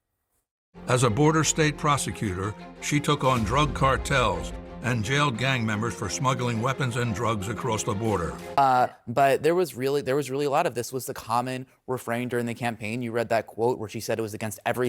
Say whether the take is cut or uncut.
cut